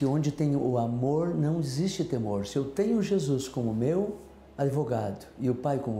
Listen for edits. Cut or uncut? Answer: uncut